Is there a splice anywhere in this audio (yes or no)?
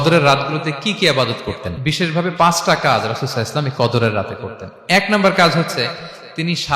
yes